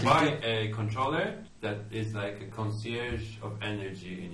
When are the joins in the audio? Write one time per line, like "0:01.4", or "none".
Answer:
0:01.5